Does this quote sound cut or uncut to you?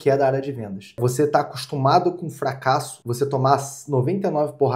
cut